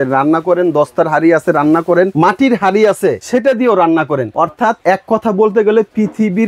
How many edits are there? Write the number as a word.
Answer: three